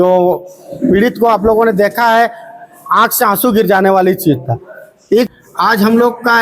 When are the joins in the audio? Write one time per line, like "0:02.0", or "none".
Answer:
0:05.3